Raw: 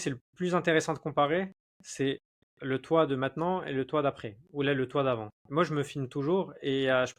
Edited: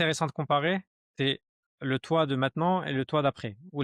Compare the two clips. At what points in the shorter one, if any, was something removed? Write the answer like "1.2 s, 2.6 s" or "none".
1.0 s